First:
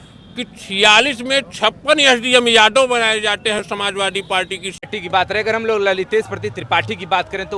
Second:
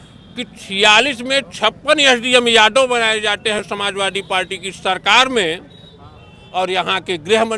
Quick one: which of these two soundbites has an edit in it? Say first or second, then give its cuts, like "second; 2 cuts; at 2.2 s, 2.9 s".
first; 1 cut; at 4.9 s